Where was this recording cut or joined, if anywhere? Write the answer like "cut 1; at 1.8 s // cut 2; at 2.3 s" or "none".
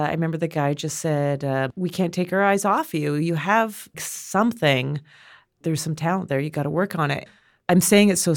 cut 1; at 1.7 s